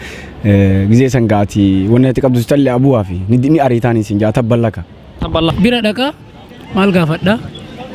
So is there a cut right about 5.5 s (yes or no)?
yes